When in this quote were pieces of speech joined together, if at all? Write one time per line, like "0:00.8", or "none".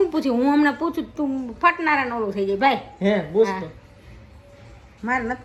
none